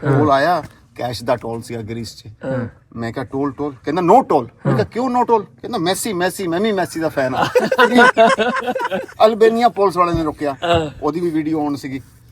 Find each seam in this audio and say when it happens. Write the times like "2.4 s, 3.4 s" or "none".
none